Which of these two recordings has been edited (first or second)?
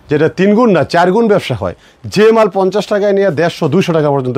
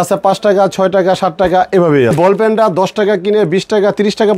second